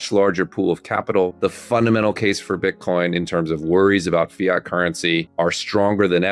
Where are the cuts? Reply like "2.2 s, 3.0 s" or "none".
1.3 s, 5.3 s